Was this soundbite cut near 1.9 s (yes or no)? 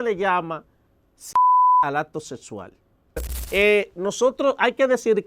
no